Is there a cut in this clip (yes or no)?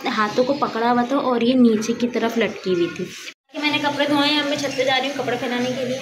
yes